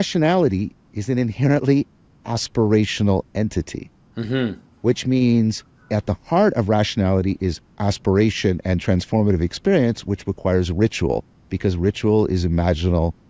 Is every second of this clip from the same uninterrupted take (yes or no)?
yes